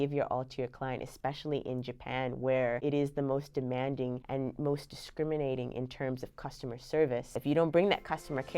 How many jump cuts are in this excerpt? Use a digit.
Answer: 3